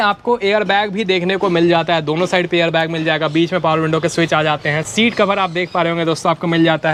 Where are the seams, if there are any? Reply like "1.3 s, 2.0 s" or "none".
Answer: none

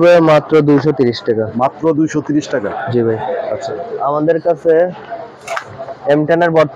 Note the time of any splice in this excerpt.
none

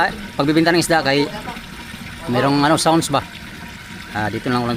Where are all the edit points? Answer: none

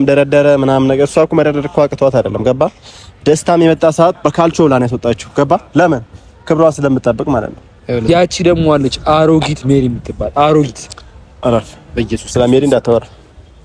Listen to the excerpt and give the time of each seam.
8.0 s

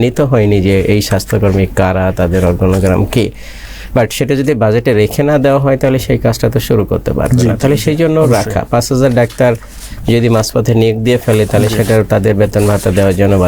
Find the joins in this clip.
none

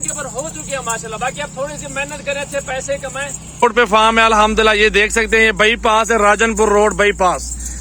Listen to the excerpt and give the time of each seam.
3.6 s

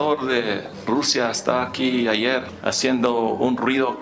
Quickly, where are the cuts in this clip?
2.5 s

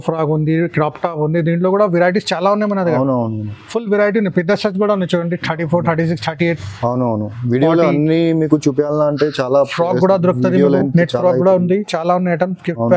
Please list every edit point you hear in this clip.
none

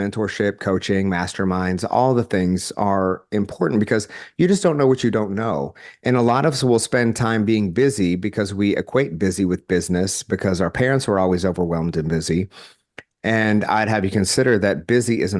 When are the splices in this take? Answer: none

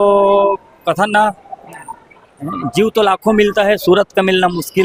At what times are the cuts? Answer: none

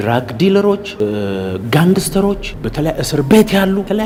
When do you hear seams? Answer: none

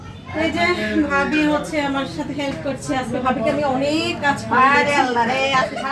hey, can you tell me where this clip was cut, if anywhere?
none

